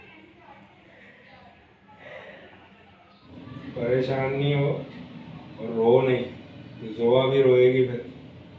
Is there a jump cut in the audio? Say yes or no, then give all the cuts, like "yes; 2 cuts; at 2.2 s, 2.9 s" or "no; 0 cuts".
yes; 1 cut; at 3.3 s